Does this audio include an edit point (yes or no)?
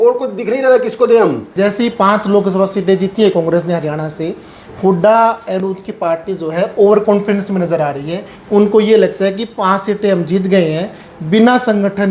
yes